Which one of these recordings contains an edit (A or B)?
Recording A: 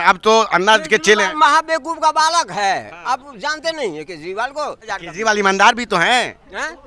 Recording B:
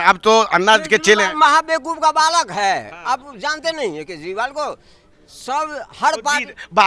A